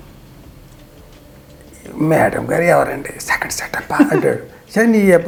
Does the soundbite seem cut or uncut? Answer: uncut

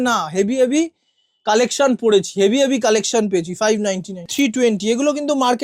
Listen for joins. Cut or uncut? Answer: cut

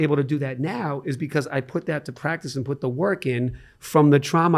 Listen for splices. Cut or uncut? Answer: uncut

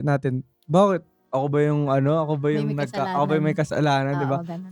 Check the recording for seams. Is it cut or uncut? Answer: uncut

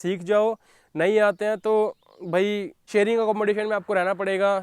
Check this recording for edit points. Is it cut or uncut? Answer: cut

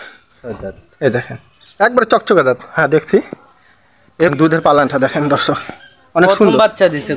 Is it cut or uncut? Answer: cut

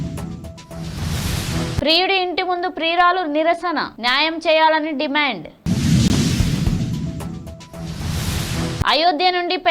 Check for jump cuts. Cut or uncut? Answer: cut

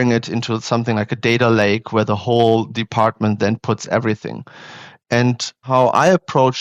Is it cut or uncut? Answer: uncut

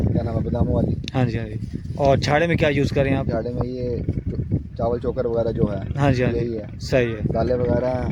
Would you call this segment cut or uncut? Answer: uncut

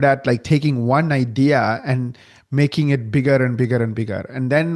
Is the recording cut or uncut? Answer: uncut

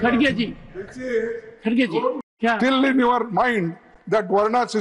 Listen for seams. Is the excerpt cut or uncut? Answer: cut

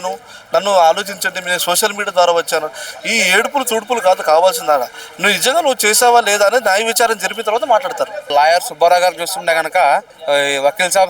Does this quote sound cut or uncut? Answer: cut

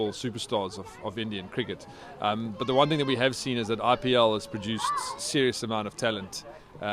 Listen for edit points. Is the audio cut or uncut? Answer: uncut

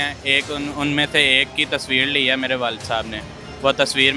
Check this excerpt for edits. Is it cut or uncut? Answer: uncut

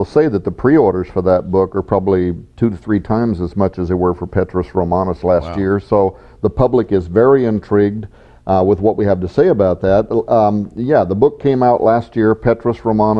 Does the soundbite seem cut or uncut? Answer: cut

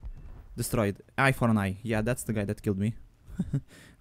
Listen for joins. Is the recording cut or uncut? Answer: uncut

